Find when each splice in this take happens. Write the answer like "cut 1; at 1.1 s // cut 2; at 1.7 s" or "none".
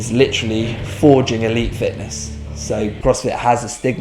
cut 1; at 3.0 s